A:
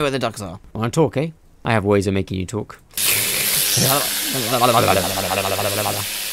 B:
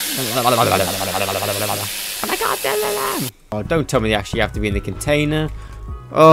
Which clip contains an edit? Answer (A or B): B